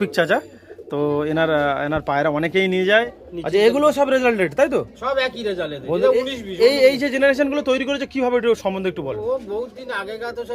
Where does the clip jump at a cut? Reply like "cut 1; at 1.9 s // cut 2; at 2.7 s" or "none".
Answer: cut 1; at 3.1 s